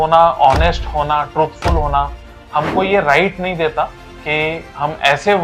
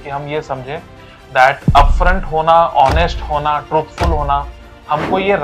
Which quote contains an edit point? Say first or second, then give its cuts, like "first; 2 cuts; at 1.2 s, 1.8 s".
first; 1 cut; at 4.1 s